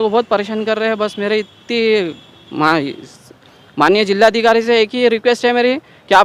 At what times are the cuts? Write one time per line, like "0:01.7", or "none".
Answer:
none